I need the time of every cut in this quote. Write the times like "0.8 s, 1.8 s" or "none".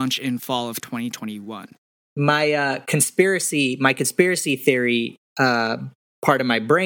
1.7 s